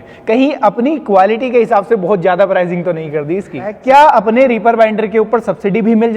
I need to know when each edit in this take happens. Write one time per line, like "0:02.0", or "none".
0:03.8